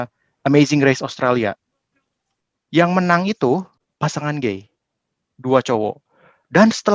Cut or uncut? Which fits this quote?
cut